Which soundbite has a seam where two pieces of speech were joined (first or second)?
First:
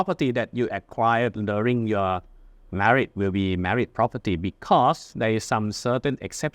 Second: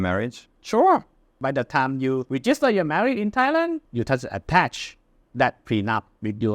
second